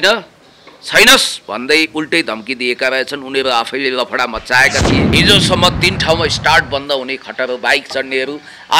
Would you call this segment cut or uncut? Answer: cut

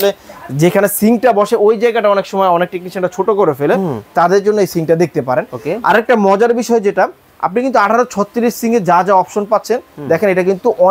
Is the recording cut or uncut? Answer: uncut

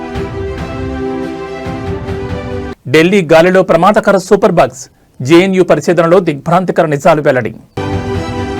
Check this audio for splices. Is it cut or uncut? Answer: cut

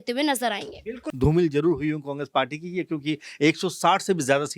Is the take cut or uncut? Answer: cut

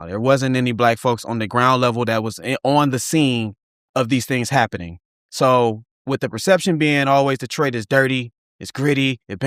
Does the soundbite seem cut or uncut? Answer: uncut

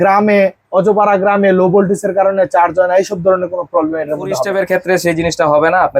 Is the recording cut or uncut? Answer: cut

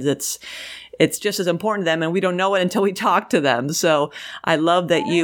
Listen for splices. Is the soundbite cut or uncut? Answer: uncut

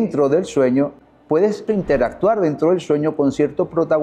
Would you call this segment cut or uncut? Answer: cut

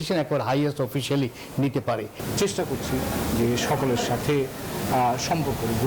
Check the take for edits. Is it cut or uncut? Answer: cut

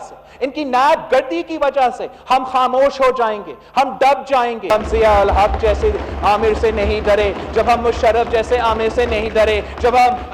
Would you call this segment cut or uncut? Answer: cut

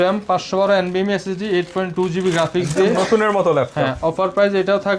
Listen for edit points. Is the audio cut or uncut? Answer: uncut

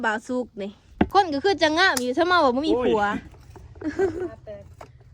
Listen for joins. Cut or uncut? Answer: cut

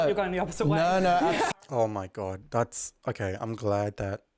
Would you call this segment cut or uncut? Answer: cut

